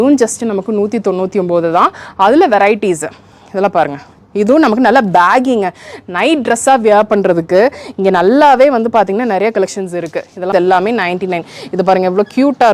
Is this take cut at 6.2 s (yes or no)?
no